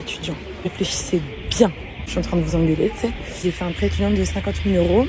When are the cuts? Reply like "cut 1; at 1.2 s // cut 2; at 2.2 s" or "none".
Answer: none